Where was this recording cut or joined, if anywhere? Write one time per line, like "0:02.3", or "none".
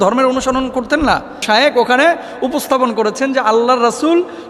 0:01.4